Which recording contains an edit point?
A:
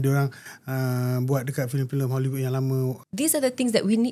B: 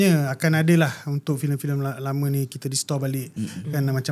A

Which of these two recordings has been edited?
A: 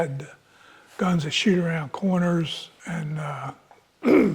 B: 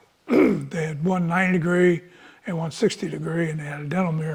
A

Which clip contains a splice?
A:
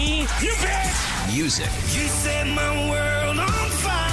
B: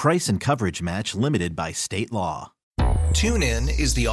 B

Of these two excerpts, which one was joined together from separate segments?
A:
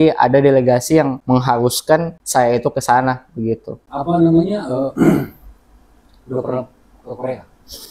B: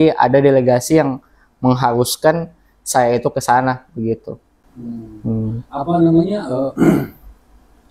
A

